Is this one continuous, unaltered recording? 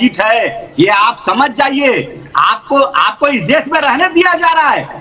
yes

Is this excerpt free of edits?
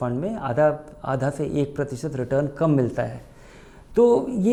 yes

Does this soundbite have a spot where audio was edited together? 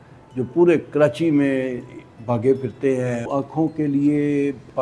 yes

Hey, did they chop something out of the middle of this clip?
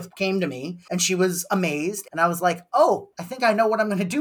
yes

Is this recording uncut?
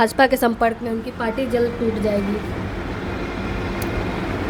yes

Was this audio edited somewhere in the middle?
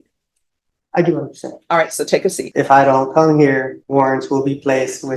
yes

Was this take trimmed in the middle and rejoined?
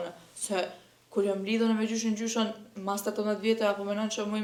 no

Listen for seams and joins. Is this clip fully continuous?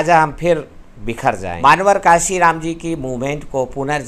no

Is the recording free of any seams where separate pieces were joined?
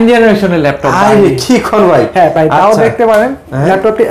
yes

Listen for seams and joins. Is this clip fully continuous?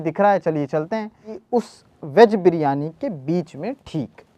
no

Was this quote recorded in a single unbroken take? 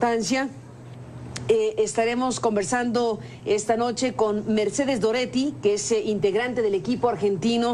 yes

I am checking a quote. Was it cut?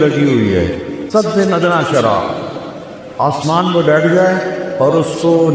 yes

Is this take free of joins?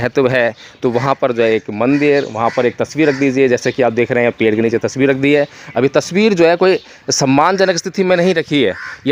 yes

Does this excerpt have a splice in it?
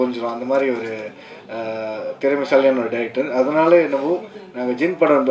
no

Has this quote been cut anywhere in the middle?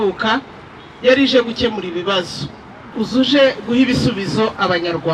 no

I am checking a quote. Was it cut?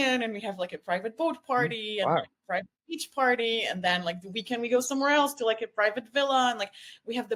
no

